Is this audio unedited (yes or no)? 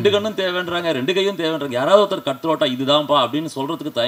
yes